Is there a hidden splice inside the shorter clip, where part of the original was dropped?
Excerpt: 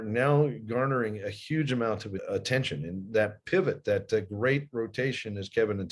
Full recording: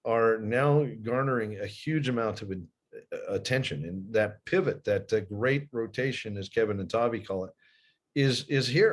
yes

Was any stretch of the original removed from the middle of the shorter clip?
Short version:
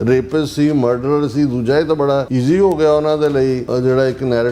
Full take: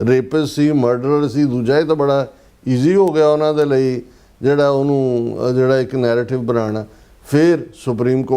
yes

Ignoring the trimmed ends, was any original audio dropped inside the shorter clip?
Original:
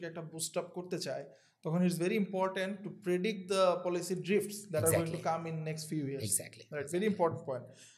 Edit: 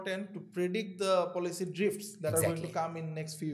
no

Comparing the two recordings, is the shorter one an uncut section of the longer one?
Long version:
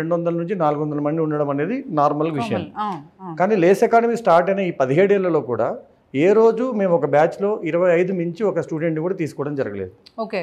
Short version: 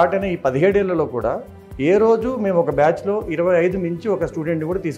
yes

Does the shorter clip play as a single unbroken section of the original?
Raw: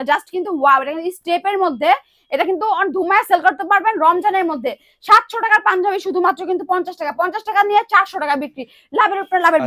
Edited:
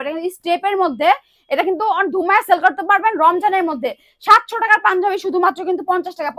yes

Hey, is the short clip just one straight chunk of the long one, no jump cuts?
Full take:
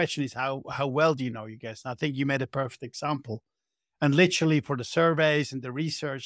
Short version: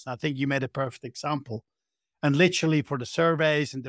yes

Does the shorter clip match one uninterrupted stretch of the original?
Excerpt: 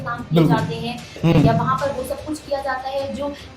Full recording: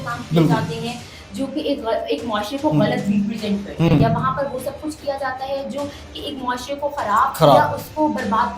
no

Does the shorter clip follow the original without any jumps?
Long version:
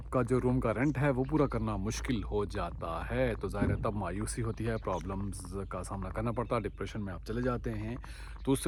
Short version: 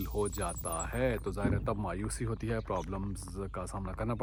yes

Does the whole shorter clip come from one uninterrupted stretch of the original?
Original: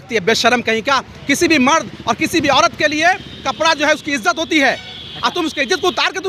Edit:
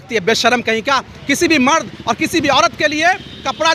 yes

